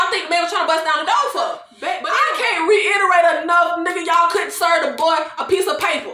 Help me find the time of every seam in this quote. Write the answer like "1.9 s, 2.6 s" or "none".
1.7 s